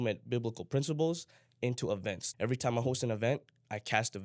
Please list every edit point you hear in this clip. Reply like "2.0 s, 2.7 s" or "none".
2.2 s